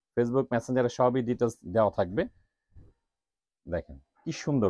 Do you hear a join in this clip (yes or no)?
no